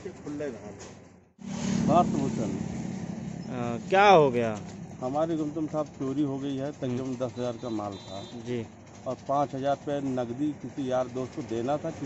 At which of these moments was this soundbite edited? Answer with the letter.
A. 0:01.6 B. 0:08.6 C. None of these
A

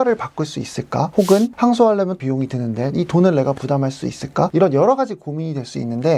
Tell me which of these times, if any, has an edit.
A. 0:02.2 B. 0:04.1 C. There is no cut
A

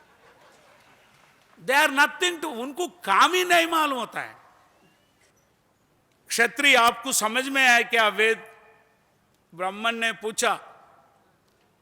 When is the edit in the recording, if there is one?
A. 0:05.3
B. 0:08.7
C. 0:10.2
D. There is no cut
A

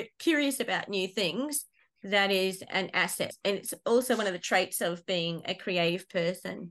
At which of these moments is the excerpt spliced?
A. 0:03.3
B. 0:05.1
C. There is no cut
A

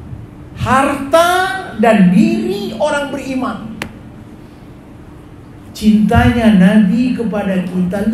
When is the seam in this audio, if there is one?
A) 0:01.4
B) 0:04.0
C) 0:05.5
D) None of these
C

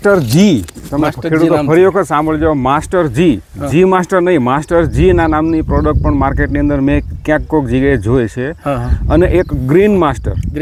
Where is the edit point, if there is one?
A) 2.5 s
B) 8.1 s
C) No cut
C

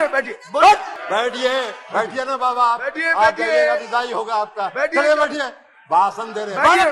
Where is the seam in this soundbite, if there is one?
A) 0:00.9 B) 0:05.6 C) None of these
A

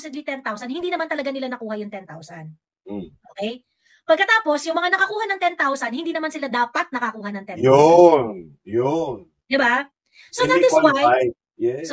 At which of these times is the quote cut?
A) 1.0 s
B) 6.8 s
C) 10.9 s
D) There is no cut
D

